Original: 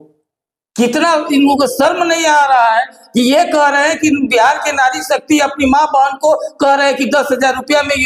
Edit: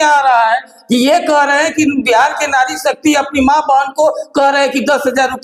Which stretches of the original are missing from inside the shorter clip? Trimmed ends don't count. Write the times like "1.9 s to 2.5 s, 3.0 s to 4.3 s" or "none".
none